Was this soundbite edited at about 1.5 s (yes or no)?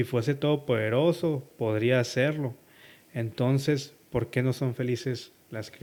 no